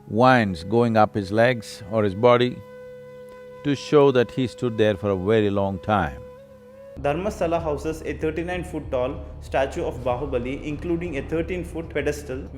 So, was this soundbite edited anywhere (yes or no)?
yes